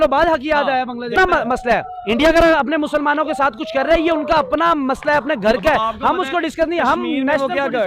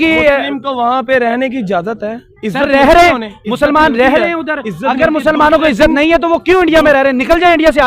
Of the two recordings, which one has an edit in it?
first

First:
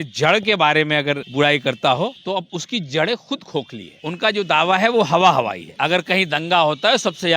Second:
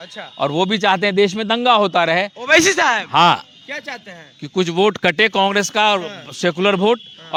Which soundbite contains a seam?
first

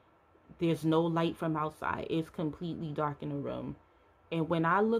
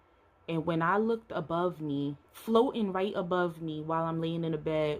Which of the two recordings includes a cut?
second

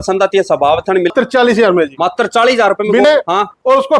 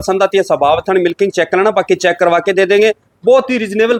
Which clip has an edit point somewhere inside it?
first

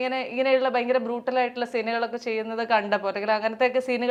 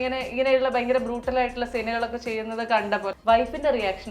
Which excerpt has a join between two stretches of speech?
second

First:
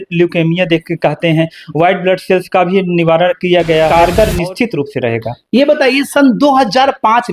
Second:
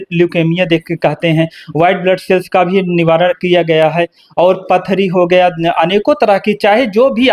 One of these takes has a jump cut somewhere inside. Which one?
first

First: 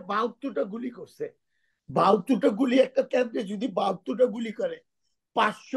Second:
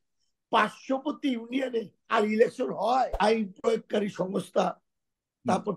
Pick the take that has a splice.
second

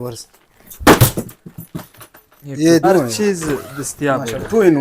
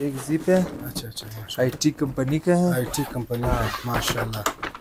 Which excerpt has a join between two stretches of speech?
first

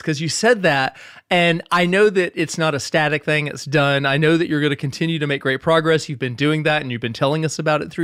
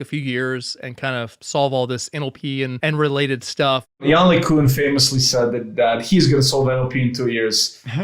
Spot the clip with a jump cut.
second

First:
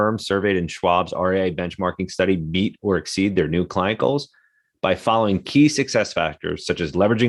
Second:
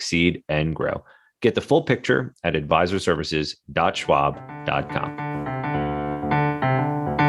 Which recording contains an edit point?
second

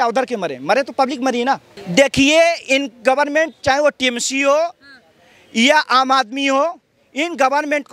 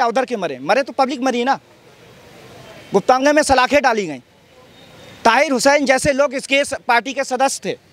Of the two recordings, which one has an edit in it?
first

